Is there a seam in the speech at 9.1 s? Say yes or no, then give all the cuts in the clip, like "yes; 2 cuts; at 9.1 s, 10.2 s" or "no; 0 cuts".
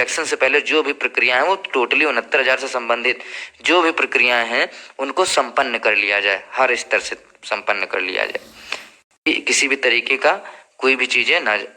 yes; 1 cut; at 9.1 s